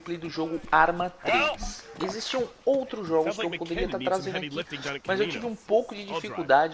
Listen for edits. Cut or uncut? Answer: cut